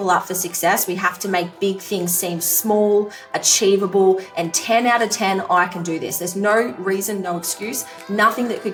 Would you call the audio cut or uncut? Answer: uncut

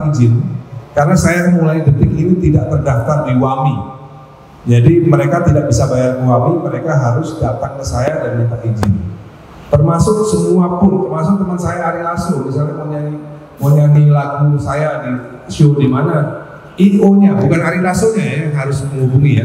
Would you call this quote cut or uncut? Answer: uncut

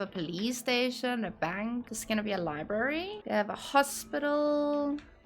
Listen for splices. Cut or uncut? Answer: cut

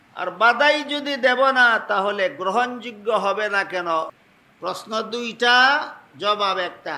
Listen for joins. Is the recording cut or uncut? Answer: cut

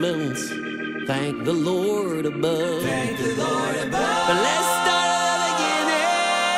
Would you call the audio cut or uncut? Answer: uncut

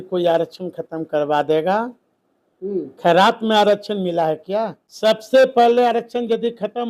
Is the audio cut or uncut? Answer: cut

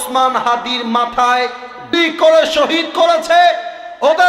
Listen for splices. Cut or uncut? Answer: cut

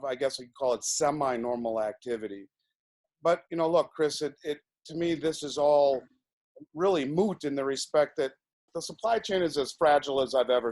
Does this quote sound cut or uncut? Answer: cut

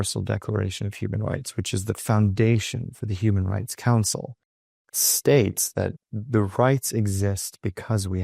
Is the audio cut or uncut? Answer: cut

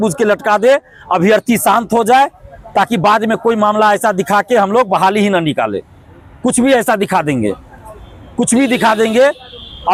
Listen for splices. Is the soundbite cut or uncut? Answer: uncut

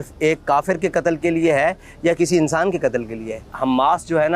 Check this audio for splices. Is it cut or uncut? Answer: cut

